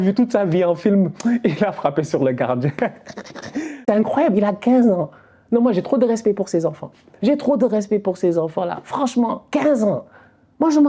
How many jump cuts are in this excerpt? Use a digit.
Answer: 1